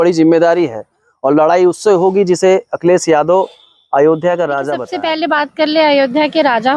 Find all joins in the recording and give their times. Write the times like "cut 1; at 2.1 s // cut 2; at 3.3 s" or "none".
cut 1; at 4.8 s